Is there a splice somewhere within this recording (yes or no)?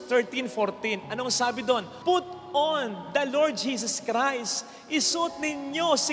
no